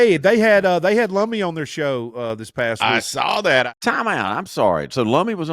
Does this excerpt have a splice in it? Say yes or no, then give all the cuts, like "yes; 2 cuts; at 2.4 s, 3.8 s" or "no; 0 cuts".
yes; 1 cut; at 3.7 s